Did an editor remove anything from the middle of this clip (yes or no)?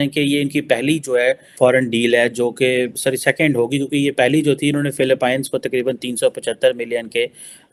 no